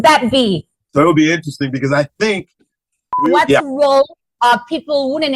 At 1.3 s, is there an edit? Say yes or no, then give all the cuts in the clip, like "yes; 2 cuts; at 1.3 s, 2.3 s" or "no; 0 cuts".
no; 1 cut; at 3.1 s